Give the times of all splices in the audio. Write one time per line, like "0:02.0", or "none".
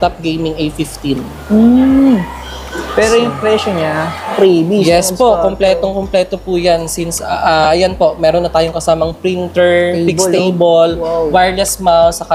0:04.3